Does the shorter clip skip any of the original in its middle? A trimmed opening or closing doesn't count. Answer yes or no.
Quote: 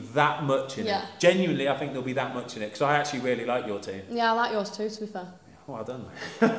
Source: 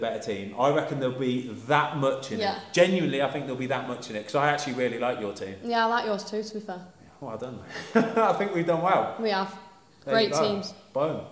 no